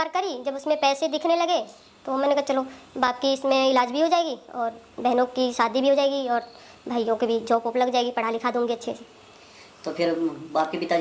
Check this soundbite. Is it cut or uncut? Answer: uncut